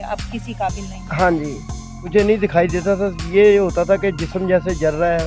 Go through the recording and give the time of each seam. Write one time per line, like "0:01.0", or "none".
0:02.1